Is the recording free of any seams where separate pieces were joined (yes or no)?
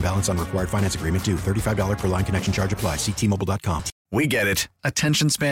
no